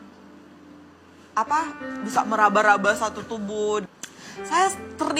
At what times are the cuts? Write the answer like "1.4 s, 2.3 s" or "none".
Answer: 3.8 s